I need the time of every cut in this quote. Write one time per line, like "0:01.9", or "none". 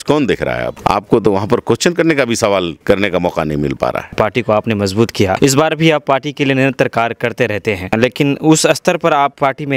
0:04.1